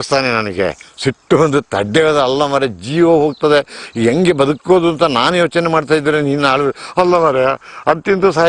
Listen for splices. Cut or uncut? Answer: uncut